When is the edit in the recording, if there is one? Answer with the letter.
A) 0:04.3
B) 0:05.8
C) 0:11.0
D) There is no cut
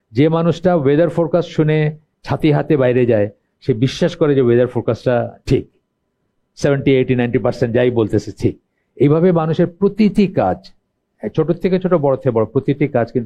D